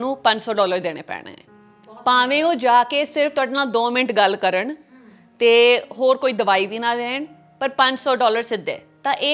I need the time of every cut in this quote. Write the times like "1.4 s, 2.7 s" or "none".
none